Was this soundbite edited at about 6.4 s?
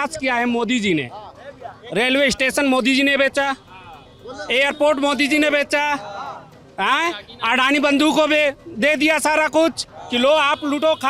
no; 0 cuts

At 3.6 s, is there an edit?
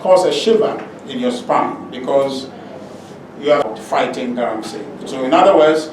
yes; 1 cut; at 3.6 s

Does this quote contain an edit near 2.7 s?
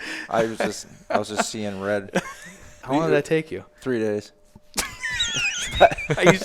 yes; 1 cut; at 2.7 s

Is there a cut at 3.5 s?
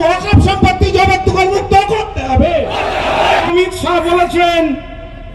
yes; 1 cut; at 3.5 s

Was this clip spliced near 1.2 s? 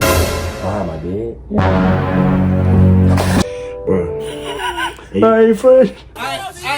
no; 1 cut; at 3.4 s

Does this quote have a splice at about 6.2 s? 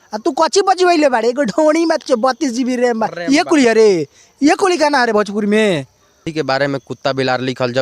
yes; 1 cut; at 6.2 s

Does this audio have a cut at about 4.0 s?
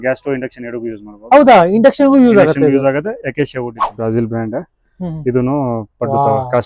yes; 1 cut; at 4.0 s

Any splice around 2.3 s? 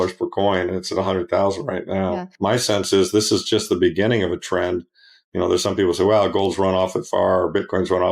yes; 1 cut; at 2.3 s

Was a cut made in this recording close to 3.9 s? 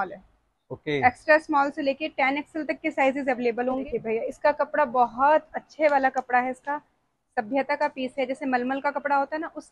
yes; 1 cut; at 3.9 s

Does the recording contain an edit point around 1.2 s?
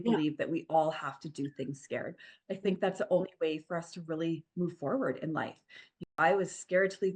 no; 1 cut; at 6.1 s

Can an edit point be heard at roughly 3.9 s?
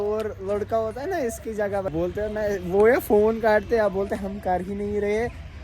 no; 1 cut; at 1.9 s

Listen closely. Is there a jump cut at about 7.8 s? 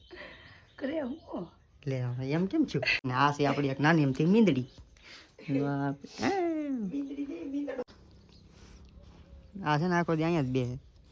yes; 2 cuts; at 2.9 s, 7.8 s

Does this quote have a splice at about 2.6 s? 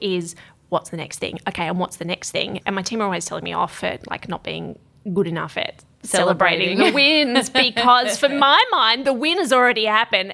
yes; 1 cut; at 2.6 s

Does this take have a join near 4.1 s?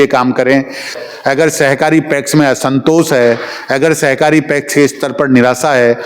no; 1 cut; at 1.0 s

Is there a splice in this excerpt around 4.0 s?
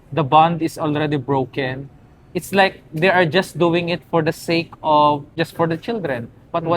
no; 1 cut; at 5.3 s

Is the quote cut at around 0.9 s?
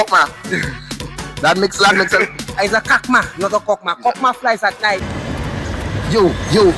no; 1 cut; at 5.1 s

